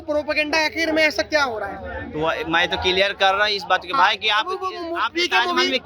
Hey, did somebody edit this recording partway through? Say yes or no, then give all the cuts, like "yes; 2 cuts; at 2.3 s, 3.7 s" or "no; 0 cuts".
no; 0 cuts